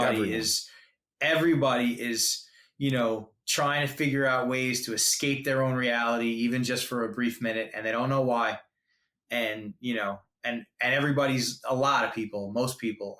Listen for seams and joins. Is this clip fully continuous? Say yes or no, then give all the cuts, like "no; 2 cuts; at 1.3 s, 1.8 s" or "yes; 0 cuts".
yes; 0 cuts